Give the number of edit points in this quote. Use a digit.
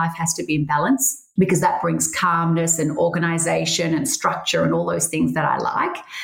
1